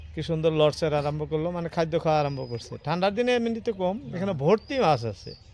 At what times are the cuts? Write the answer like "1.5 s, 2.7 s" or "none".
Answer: none